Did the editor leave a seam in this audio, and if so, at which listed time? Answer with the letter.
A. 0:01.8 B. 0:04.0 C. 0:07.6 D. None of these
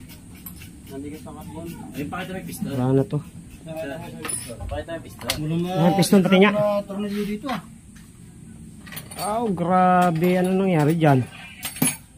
D